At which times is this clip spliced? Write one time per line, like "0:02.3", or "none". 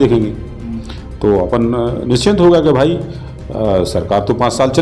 none